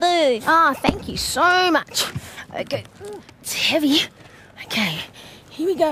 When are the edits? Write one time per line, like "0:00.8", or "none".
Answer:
0:03.7